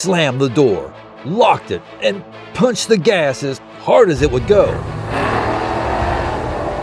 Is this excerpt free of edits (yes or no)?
no